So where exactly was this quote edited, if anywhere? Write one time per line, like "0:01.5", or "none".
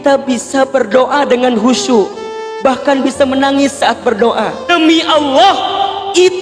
0:04.6